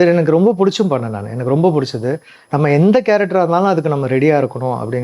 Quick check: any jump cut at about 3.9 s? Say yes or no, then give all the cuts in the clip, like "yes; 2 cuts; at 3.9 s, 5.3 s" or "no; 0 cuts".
no; 1 cut; at 2.4 s